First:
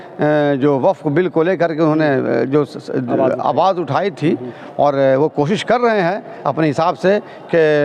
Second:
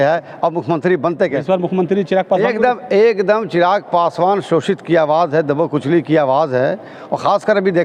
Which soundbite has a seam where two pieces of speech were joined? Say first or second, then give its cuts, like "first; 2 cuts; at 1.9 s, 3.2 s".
second; 1 cut; at 1.4 s